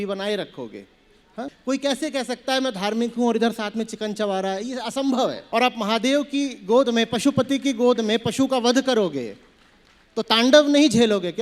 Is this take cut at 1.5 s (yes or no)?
yes